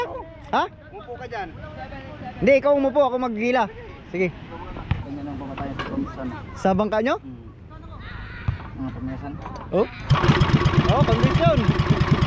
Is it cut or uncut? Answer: cut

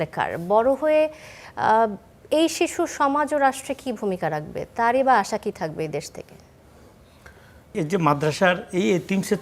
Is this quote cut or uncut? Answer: cut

